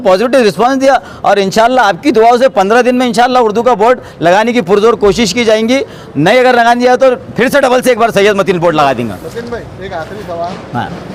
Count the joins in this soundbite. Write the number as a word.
zero